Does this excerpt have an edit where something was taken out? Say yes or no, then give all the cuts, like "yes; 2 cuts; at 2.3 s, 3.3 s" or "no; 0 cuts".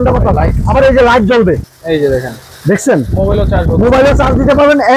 yes; 1 cut; at 1.7 s